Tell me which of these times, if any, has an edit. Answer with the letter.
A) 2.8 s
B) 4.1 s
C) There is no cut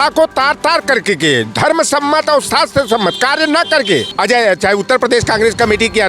B